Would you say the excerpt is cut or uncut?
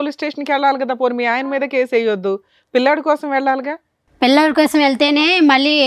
uncut